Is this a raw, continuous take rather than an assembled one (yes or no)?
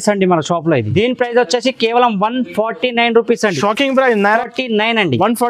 no